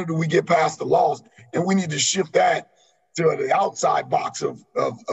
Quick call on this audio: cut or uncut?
uncut